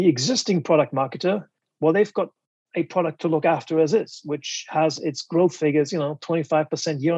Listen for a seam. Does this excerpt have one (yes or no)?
no